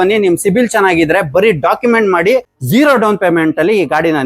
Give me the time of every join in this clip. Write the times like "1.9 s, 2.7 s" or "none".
2.6 s